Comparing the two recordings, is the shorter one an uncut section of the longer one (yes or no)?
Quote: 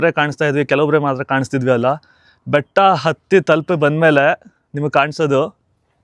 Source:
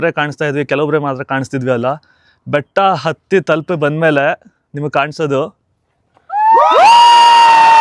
yes